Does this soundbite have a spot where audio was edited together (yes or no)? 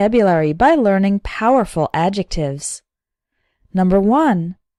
no